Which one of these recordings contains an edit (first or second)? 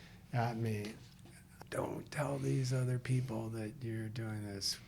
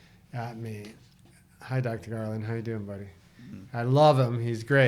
first